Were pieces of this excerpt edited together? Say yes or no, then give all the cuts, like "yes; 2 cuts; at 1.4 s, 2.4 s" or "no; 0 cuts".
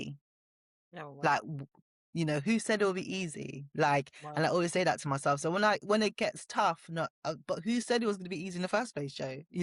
no; 0 cuts